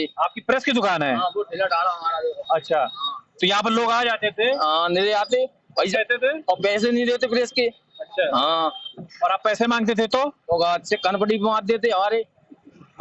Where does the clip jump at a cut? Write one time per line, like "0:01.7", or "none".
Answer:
none